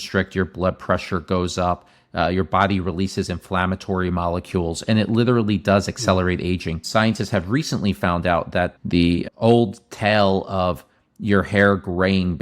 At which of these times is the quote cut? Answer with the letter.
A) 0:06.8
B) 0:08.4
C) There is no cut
A